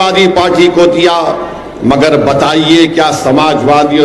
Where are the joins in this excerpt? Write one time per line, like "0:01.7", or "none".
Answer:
none